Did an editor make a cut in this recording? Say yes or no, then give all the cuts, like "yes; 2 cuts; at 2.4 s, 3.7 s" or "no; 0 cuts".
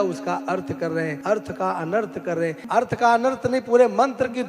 yes; 2 cuts; at 1.2 s, 2.6 s